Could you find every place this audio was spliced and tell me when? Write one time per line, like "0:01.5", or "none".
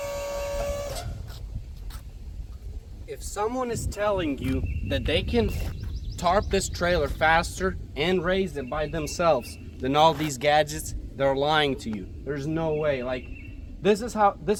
none